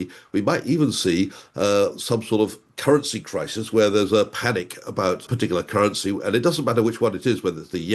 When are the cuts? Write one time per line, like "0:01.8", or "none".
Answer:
0:05.3